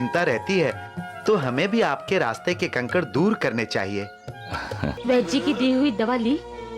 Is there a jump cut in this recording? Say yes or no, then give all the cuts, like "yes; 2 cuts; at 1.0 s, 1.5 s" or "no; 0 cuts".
yes; 1 cut; at 5.0 s